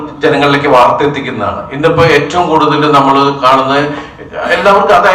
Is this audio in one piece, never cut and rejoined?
yes; 0 cuts

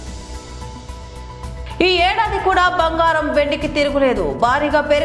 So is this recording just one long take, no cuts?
no; 1 cut; at 1.0 s

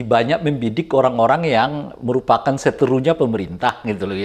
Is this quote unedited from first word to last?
yes; 0 cuts

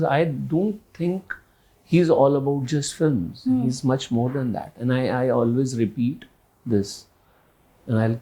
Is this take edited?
no; 0 cuts

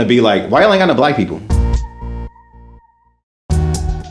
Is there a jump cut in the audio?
yes; 1 cut; at 1.4 s

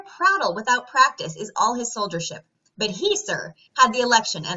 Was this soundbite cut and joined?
no; 0 cuts

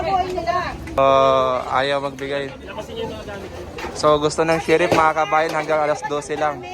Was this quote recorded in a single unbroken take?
no; 1 cut; at 1.0 s

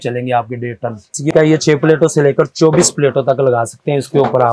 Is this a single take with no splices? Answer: no; 1 cut; at 1.3 s

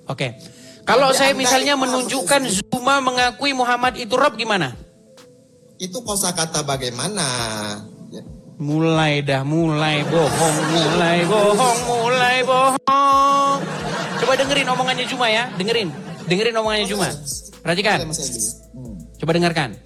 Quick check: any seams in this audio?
no; 0 cuts

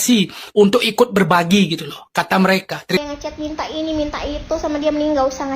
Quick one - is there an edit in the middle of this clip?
yes; 1 cut; at 3.0 s

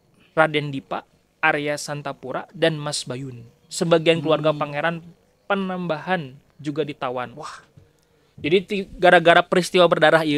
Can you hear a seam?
no; 0 cuts

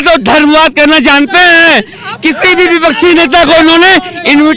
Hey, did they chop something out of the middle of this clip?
no; 0 cuts

